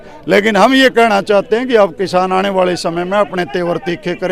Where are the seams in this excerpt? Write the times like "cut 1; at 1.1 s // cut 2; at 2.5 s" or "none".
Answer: none